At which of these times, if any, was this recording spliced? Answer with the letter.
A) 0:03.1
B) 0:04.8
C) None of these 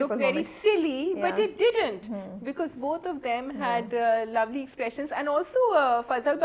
C